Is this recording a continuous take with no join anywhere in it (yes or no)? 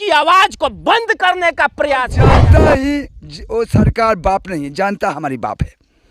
no